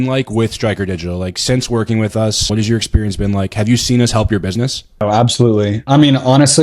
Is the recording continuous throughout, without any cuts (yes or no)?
no